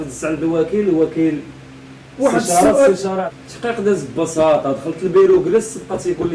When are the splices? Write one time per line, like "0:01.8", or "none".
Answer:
0:03.2